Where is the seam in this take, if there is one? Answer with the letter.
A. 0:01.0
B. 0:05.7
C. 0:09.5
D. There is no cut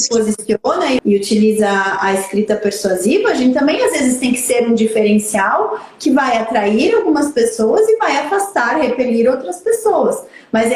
A